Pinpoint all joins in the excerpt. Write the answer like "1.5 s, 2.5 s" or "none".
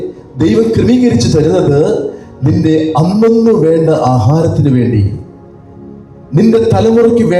none